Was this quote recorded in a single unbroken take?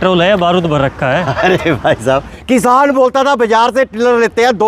no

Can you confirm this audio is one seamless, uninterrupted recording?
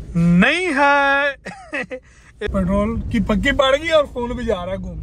no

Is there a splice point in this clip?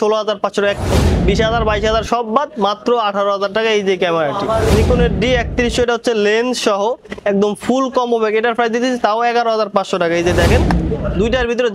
yes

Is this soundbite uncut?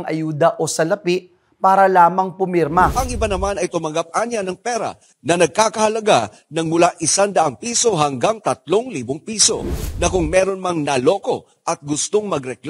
no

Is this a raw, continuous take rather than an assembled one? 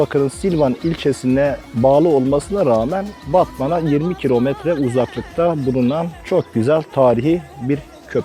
yes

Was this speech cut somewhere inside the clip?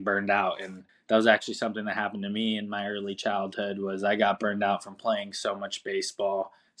no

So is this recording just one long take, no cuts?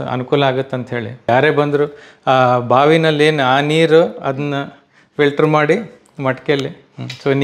no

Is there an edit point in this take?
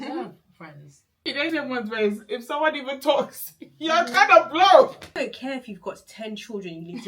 yes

